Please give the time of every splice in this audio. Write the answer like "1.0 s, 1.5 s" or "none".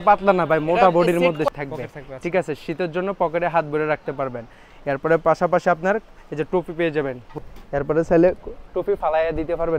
1.5 s, 7.3 s